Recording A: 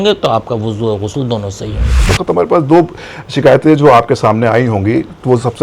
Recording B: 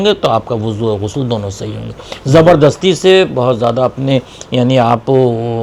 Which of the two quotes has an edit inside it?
A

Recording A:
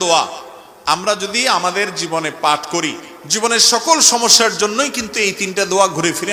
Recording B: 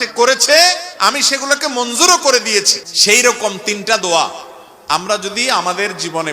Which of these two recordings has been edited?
B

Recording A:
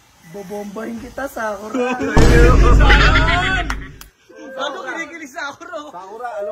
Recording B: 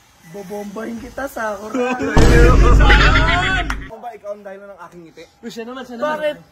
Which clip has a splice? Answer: B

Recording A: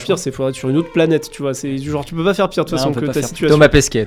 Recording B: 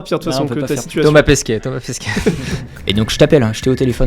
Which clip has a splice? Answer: B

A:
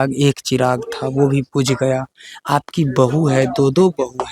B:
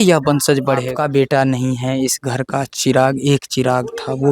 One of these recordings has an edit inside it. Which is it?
B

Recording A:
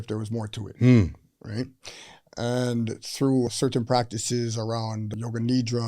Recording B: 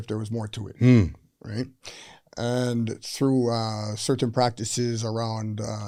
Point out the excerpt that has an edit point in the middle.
A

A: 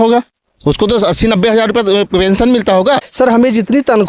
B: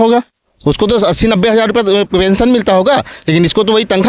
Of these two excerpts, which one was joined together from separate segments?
A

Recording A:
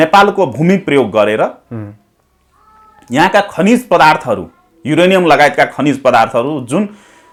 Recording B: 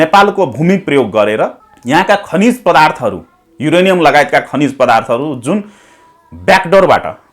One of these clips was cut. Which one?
B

